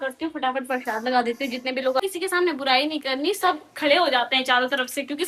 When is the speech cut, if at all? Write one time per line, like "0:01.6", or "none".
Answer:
0:02.0